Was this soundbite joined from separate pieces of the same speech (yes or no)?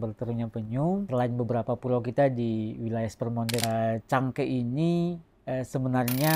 yes